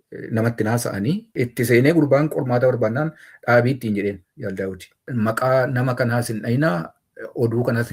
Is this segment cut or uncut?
cut